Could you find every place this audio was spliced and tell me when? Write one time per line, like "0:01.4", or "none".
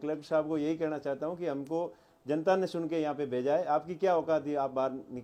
none